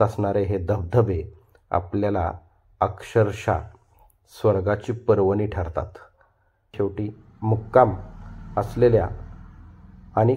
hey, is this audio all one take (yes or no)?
no